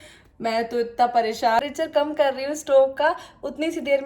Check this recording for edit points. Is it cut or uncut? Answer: cut